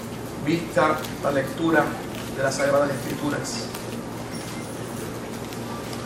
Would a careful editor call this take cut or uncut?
uncut